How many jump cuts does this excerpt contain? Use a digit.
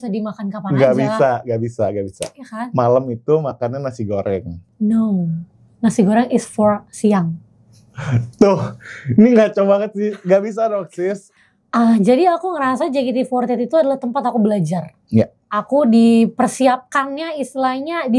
2